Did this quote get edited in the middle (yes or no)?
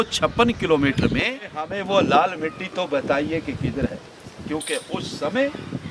yes